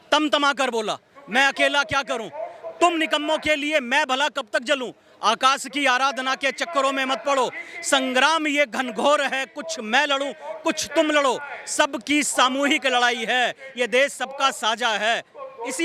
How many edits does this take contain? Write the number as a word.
zero